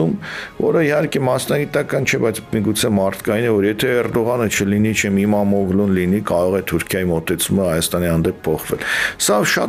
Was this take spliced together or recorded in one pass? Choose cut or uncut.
uncut